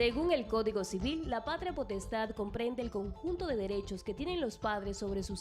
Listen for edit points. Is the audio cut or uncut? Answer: uncut